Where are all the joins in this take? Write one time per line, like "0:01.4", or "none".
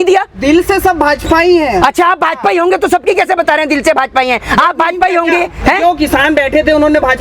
none